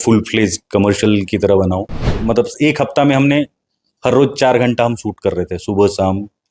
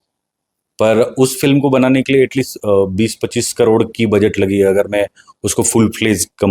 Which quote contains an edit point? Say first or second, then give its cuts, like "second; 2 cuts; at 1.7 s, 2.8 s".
first; 1 cut; at 2.0 s